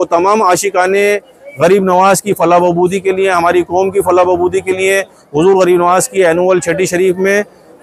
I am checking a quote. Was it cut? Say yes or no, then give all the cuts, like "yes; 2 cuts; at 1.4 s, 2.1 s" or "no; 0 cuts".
no; 0 cuts